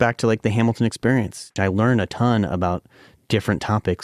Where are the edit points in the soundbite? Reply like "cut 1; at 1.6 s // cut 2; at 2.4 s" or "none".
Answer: cut 1; at 1.5 s